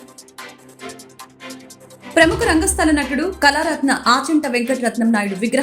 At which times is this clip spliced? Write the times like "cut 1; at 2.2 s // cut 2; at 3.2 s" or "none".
none